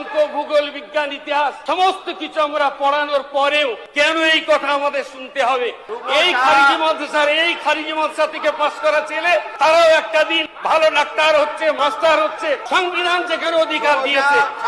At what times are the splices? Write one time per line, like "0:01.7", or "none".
0:01.6
0:03.8
0:05.9
0:09.5
0:10.5
0:11.8
0:12.6

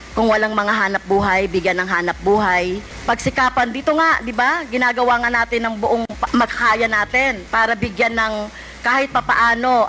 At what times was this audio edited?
none

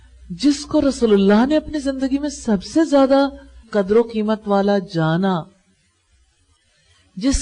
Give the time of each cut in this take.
0:03.6

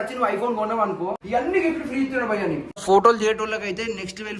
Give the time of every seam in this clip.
0:01.2
0:02.8

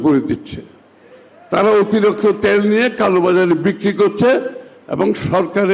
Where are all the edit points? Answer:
none

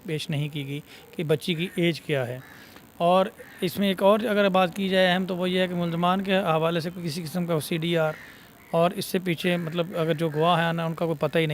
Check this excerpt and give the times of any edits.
none

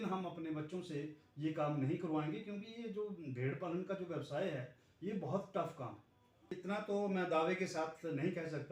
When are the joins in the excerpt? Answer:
0:06.6

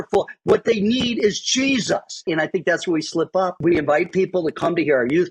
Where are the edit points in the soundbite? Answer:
0:02.1
0:03.6

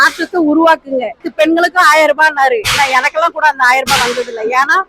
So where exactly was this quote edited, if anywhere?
0:01.2

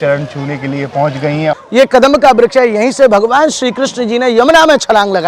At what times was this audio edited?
0:01.5

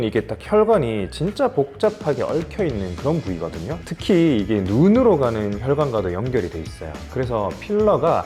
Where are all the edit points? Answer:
none

